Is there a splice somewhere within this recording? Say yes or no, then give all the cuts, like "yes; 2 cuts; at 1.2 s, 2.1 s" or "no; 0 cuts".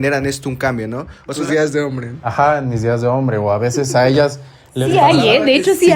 yes; 1 cut; at 1.4 s